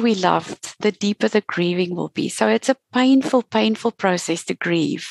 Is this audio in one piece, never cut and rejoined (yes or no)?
yes